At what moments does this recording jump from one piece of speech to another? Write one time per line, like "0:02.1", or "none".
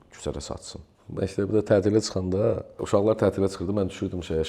0:00.9
0:02.7